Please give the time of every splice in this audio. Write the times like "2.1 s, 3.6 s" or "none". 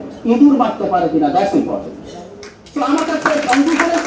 none